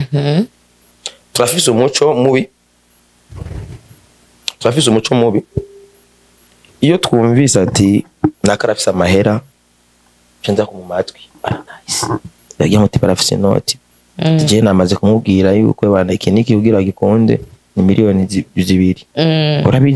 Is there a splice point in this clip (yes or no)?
no